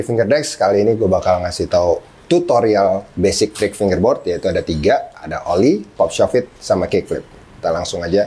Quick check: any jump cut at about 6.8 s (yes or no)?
no